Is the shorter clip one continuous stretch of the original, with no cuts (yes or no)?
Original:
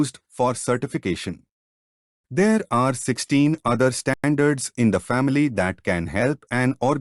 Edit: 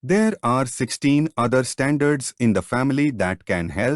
no